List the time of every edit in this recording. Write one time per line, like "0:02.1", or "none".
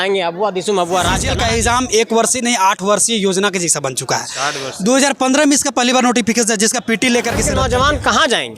0:01.3
0:07.5